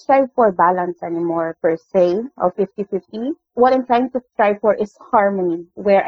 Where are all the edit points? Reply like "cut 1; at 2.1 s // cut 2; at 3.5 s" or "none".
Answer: none